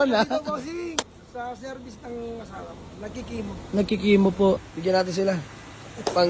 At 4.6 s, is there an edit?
yes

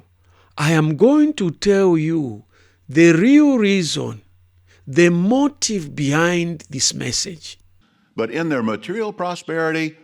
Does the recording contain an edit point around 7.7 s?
yes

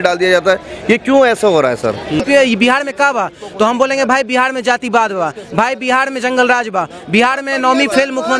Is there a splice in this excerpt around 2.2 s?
yes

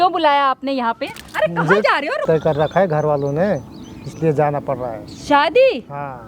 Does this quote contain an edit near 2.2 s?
yes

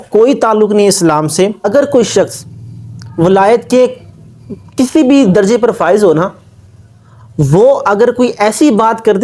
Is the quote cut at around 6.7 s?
no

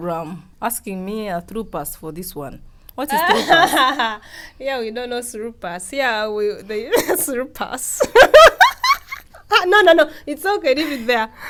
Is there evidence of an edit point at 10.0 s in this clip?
no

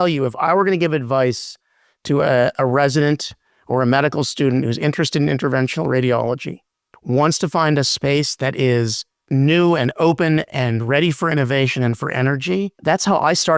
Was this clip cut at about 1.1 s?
no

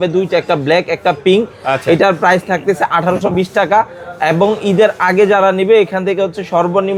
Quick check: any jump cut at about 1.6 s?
no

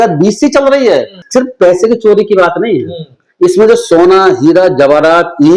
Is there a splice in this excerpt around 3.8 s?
no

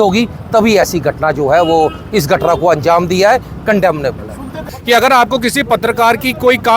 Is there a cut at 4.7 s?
yes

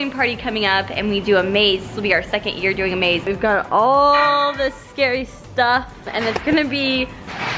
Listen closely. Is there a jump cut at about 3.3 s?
yes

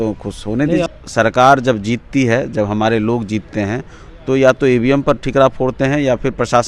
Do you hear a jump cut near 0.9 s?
yes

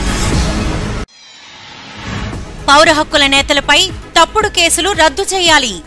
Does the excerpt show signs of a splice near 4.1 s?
no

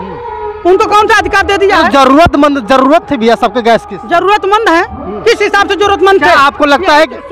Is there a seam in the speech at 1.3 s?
no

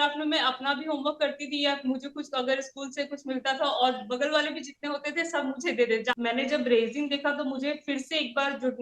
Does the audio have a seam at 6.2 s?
yes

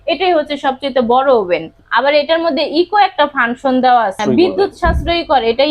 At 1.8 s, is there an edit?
yes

